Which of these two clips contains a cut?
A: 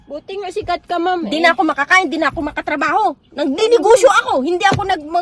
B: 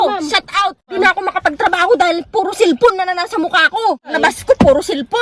B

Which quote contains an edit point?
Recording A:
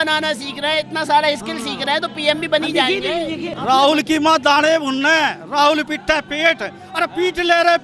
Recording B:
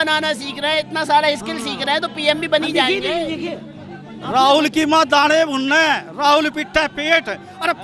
A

